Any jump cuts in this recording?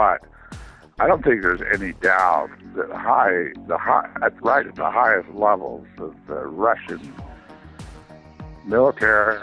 yes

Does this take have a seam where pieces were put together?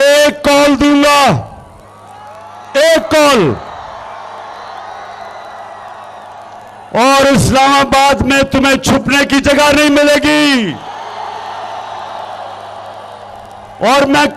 no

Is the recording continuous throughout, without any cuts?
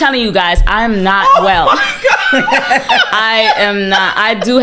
yes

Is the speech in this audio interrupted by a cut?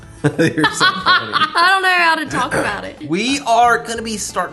yes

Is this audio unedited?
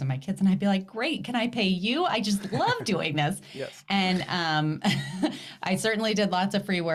yes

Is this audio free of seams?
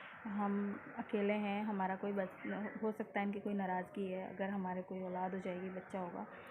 yes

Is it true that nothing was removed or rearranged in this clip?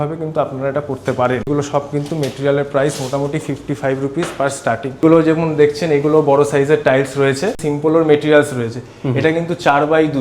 no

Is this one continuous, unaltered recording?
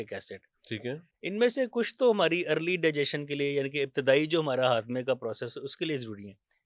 yes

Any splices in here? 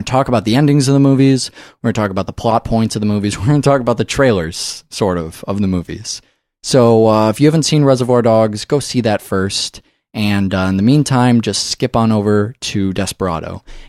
yes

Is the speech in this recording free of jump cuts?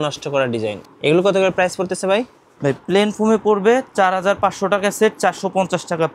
yes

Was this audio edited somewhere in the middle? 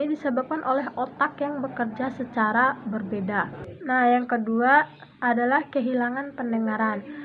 yes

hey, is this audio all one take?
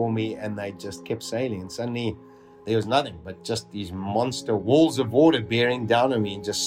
no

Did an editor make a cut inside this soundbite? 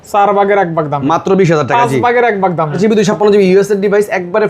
yes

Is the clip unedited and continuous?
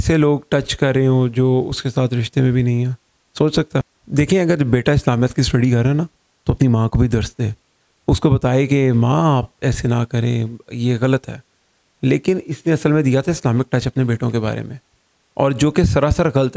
yes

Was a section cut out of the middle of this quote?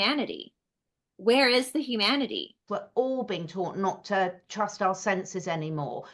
yes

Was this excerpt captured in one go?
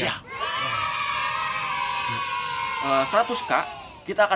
no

